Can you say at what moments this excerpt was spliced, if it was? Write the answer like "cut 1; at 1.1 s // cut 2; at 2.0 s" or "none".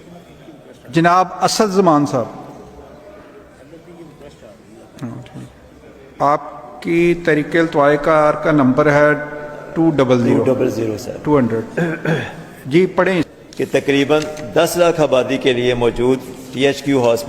cut 1; at 5.7 s // cut 2; at 13.3 s